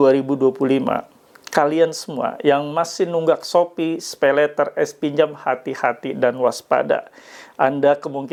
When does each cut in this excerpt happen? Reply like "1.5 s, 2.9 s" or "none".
none